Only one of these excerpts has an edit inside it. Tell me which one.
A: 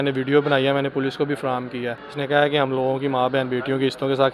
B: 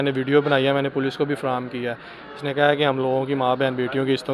A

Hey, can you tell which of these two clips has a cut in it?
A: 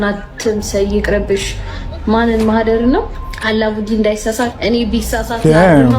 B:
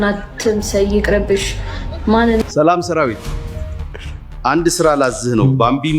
B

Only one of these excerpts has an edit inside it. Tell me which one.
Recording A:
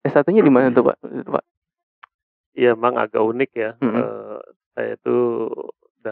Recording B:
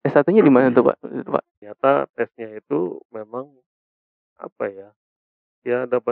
B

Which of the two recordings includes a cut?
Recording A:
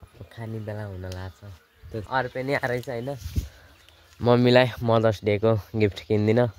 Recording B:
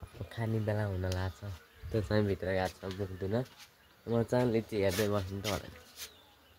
A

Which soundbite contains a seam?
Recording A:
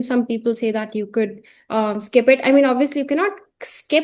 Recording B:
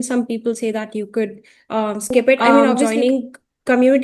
B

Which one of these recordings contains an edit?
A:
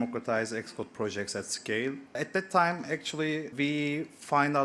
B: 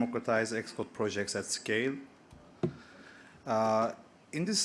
A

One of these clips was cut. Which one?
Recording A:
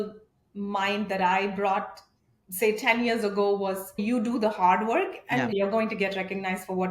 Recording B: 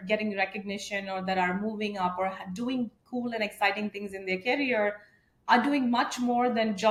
A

